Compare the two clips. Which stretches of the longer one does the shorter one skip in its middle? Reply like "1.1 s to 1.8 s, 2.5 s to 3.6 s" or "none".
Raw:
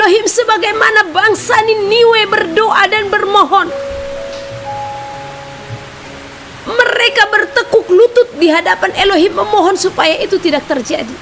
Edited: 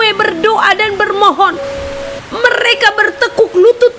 4.3 s to 6.5 s